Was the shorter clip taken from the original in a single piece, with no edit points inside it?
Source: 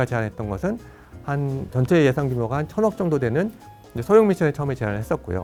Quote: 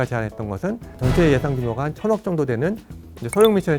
no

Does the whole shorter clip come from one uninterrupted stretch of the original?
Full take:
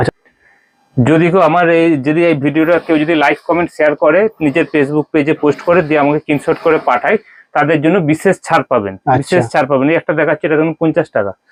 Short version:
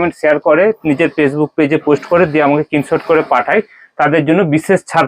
yes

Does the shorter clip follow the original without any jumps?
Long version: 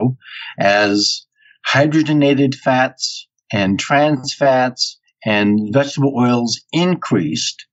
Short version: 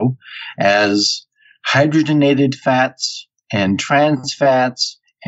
yes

